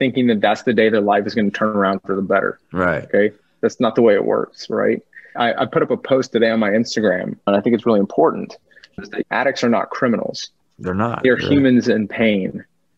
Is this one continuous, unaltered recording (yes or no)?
no